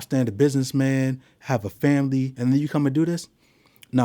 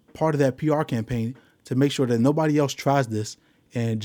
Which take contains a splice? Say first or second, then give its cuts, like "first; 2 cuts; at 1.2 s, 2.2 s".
first; 1 cut; at 2.3 s